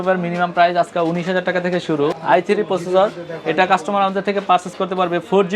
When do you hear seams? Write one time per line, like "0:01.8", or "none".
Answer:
0:02.2